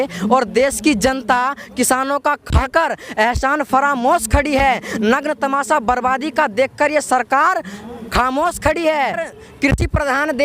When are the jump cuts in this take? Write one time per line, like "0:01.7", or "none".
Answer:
0:09.3